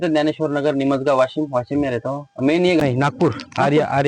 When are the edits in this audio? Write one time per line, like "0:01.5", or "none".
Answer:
0:02.8